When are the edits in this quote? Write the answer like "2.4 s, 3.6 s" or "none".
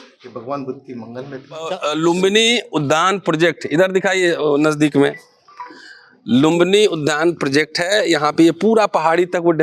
1.8 s